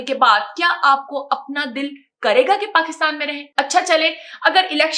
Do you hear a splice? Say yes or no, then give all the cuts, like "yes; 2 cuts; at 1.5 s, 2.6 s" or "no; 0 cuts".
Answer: yes; 1 cut; at 3.3 s